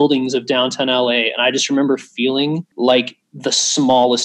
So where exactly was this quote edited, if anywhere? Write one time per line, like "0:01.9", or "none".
0:02.7
0:03.2